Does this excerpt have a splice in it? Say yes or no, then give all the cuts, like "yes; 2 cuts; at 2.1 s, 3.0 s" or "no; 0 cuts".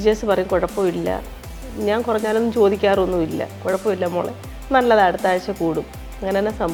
no; 0 cuts